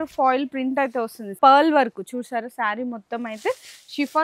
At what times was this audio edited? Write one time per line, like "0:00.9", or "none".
0:01.4